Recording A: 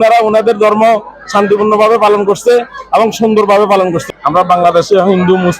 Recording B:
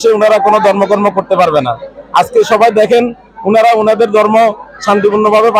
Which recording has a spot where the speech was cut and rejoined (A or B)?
A